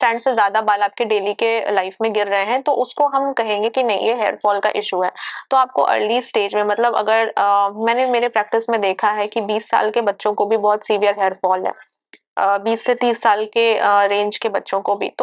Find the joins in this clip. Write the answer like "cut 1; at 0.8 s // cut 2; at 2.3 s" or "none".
none